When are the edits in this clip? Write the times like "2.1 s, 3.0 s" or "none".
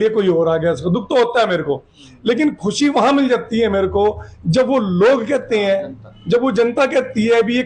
none